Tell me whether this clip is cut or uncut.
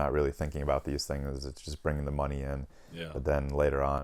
uncut